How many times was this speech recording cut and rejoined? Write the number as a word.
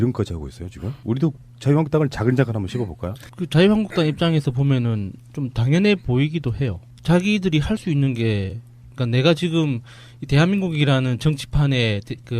one